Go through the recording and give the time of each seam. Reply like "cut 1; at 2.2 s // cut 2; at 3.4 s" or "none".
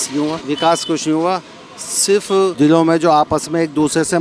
cut 1; at 2.5 s